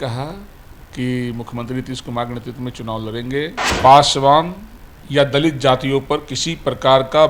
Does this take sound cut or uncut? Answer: cut